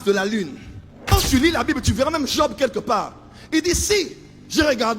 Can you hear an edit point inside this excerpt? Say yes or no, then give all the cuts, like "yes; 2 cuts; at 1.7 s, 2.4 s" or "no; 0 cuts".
yes; 1 cut; at 1.1 s